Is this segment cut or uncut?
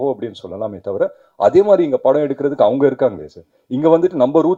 uncut